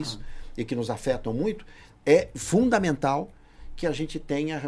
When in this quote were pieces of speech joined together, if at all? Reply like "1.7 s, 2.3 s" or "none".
none